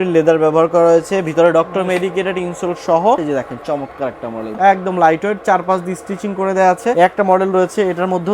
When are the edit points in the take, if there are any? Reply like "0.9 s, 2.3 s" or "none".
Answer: 3.2 s, 4.5 s, 6.9 s

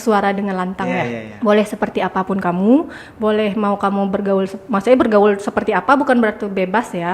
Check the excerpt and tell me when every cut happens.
1.2 s

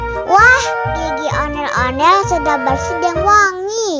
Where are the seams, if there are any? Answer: none

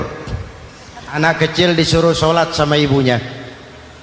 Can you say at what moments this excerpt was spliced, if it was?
1.2 s

